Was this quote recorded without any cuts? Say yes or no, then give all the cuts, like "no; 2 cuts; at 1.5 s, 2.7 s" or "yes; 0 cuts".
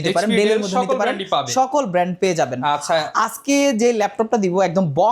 yes; 0 cuts